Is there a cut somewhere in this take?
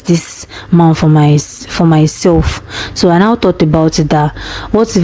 no; 0 cuts

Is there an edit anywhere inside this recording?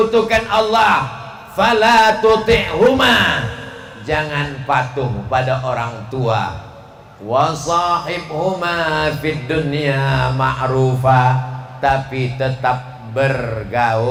no; 0 cuts

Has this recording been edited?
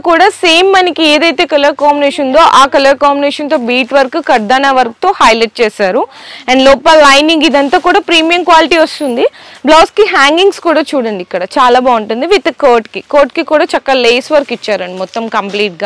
no; 0 cuts

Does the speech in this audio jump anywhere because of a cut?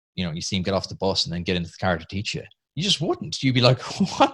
no; 0 cuts

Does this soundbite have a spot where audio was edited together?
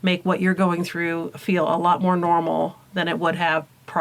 no; 0 cuts

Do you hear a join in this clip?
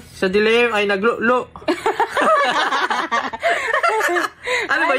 no; 0 cuts

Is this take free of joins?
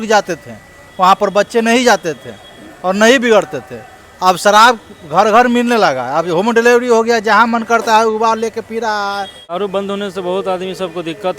no; 1 cut; at 9.6 s

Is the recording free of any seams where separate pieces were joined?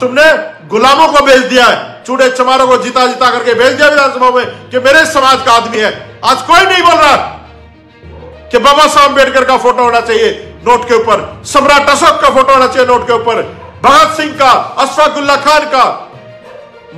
yes; 0 cuts

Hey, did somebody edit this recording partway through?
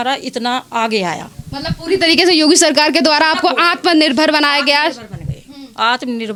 no; 0 cuts

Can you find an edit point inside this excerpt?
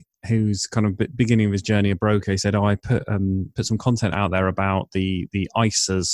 no; 0 cuts

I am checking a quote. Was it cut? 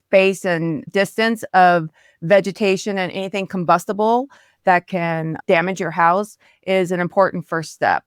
no; 0 cuts

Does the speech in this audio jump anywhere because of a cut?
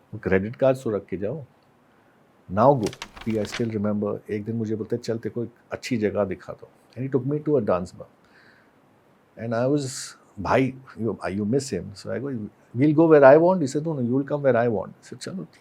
yes; 1 cut; at 3.2 s

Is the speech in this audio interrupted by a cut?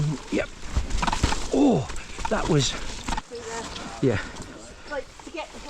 yes; 1 cut; at 3.1 s

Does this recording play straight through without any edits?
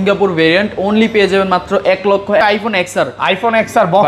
no; 1 cut; at 2.4 s

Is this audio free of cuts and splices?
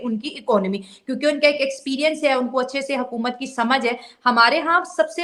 yes; 0 cuts

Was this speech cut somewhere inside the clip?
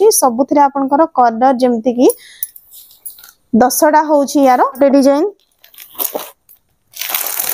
yes; 1 cut; at 4.8 s

